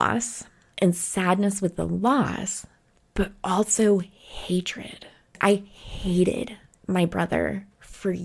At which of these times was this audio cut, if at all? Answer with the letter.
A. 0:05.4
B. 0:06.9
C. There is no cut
A